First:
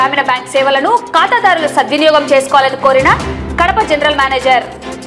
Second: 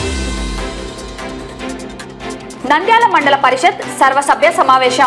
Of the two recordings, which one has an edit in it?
second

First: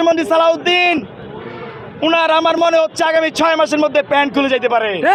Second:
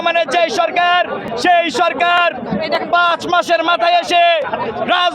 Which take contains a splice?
second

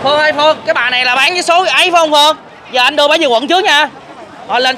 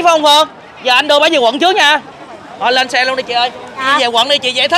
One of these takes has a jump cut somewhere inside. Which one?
second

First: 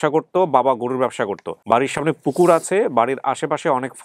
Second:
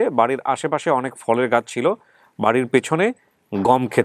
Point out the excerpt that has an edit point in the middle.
first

